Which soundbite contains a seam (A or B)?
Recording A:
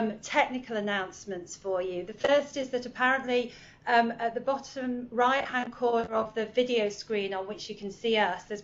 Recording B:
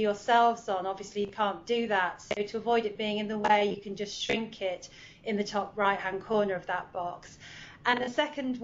B